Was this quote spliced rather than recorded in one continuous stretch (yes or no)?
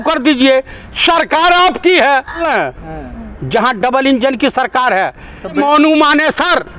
yes